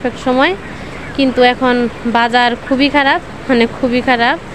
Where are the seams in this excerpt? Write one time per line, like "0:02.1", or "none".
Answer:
none